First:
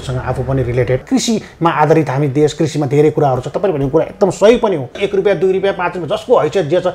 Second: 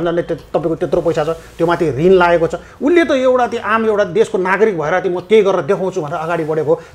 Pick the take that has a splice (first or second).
first